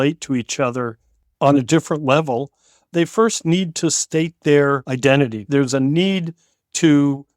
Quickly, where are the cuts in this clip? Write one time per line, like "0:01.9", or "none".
0:04.9